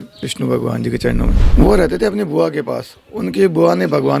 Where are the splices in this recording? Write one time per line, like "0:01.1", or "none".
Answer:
0:01.4